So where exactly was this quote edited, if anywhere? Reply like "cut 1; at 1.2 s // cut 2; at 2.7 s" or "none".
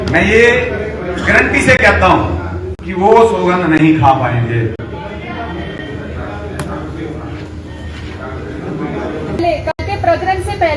cut 1; at 9.4 s